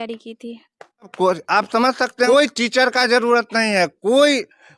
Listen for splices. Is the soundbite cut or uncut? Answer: cut